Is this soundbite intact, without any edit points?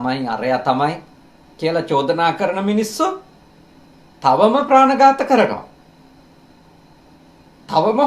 yes; 0 cuts

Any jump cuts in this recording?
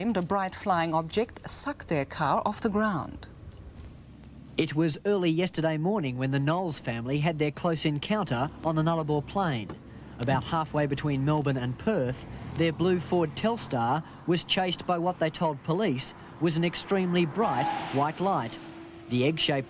yes; 1 cut; at 14.5 s

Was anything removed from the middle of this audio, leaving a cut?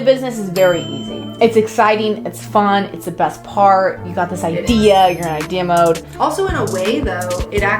yes; 2 cuts; at 1.2 s, 6.1 s

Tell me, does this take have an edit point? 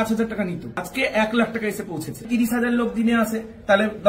yes; 2 cuts; at 0.9 s, 2.3 s

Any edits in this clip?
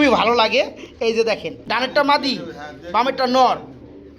yes; 1 cut; at 1.3 s

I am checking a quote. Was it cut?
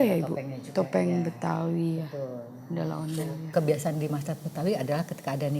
yes; 1 cut; at 3.5 s

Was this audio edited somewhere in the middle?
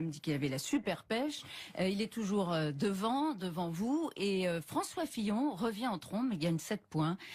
no; 0 cuts

